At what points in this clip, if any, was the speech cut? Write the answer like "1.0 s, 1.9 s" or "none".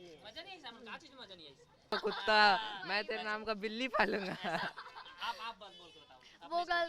1.9 s